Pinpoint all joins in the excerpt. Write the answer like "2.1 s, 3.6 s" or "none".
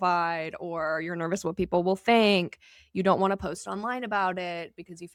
none